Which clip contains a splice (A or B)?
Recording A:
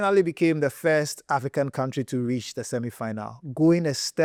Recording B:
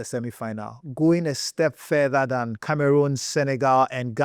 B